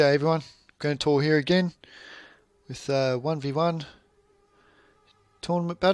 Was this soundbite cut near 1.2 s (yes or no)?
yes